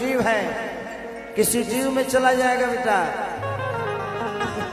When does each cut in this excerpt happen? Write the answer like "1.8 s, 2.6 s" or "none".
none

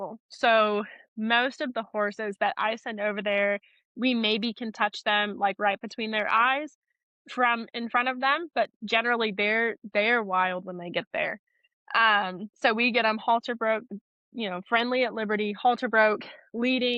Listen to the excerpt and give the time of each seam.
none

